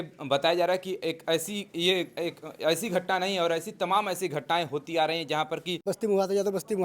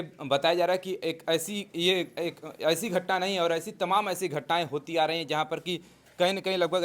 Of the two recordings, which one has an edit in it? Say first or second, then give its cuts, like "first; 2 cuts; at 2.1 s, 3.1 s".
first; 1 cut; at 5.8 s